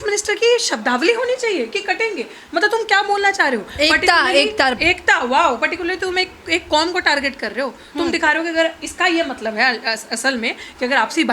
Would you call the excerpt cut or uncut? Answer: uncut